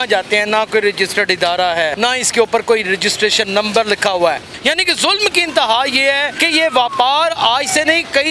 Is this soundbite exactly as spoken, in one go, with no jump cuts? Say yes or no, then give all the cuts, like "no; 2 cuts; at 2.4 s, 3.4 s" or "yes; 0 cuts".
no; 3 cuts; at 1.9 s, 4.5 s, 6.3 s